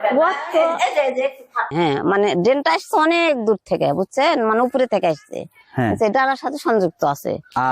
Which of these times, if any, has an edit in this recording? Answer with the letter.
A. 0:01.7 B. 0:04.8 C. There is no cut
A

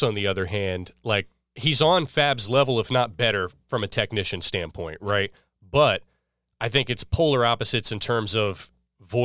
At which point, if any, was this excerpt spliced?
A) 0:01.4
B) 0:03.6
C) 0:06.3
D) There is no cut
A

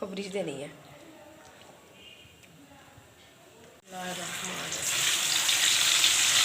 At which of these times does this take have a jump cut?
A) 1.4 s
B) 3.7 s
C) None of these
B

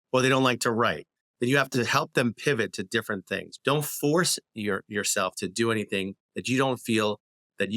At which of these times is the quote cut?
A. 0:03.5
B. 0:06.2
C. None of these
A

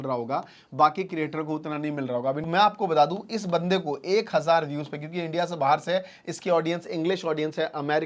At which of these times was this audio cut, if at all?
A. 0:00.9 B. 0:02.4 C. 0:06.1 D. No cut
B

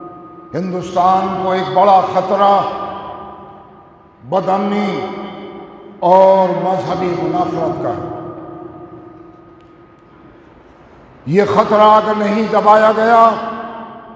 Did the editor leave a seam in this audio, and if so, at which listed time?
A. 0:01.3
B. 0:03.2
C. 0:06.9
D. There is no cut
D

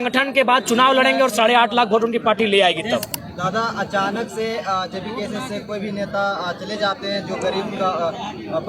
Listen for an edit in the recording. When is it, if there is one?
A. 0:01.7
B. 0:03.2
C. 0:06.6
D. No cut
B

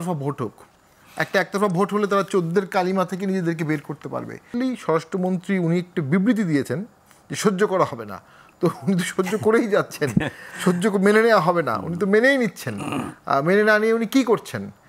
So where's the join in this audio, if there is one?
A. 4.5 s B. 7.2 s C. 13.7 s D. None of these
A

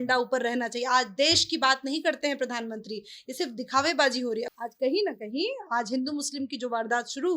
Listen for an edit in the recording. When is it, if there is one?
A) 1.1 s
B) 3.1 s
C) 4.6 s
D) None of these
C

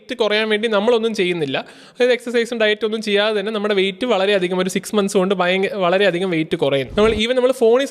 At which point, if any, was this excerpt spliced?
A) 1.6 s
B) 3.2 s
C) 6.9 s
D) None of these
C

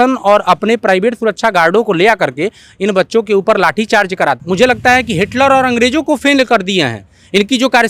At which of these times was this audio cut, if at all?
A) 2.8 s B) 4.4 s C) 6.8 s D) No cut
B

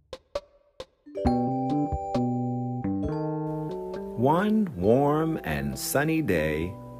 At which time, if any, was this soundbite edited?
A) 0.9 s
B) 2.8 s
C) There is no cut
A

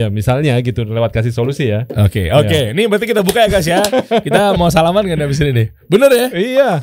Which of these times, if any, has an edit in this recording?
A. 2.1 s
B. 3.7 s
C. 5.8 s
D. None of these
D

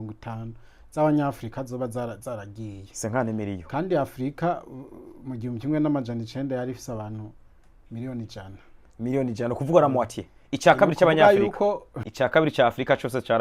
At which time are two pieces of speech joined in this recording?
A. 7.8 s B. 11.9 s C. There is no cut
B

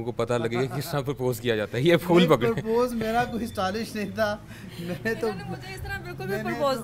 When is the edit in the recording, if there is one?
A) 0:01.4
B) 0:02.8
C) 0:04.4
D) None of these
D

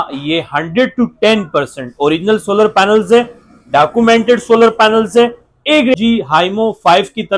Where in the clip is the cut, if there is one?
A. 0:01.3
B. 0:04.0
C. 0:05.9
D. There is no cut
C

